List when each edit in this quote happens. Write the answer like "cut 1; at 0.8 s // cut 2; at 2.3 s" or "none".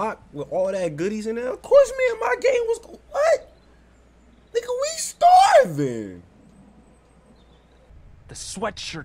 cut 1; at 7.9 s